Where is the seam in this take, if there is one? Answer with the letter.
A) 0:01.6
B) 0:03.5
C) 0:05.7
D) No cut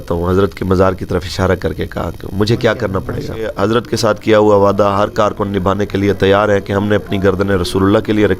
B